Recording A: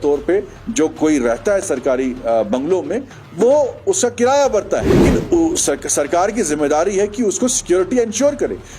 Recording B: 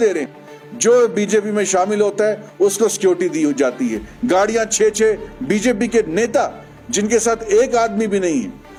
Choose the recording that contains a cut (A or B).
A